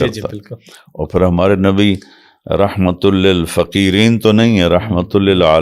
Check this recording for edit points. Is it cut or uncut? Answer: uncut